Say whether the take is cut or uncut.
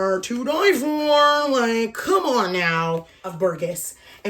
cut